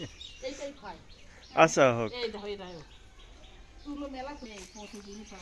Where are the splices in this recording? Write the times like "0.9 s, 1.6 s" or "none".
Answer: 4.5 s